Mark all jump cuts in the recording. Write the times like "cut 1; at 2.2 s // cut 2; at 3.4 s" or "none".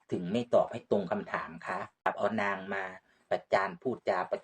cut 1; at 2.1 s

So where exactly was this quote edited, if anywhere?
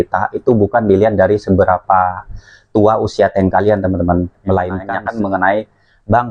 cut 1; at 4.9 s

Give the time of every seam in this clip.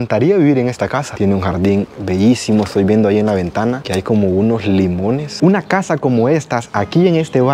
cut 1; at 1.1 s // cut 2; at 5.3 s

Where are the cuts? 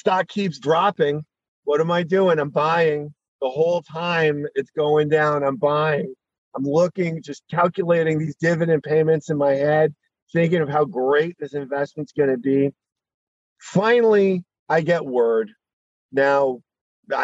cut 1; at 1.5 s

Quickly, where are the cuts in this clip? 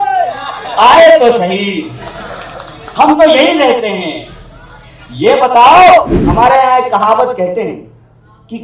cut 1; at 6.2 s

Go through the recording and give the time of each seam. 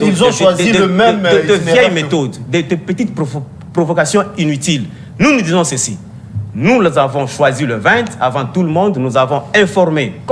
none

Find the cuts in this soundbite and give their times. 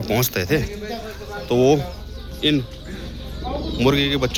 none

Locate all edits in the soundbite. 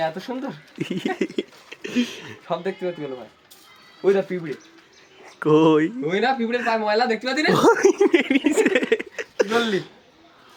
none

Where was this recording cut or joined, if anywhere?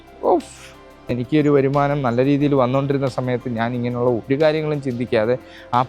cut 1; at 1.1 s

